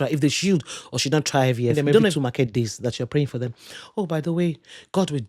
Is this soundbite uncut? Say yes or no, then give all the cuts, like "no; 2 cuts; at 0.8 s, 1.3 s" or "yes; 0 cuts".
no; 1 cut; at 2.1 s